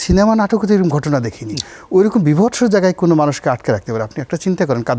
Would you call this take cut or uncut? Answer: uncut